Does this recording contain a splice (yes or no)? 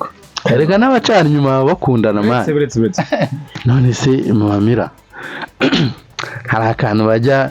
yes